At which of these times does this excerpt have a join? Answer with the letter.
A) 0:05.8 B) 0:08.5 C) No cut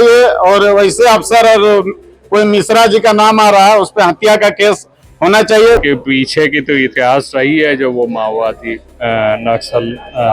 A